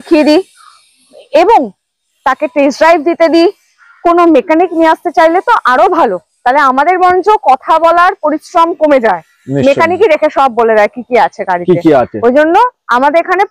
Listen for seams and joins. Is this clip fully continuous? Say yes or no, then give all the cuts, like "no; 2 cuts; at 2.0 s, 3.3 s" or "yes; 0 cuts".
yes; 0 cuts